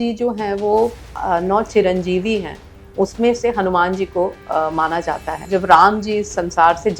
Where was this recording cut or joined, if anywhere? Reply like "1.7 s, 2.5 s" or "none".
1.1 s, 5.4 s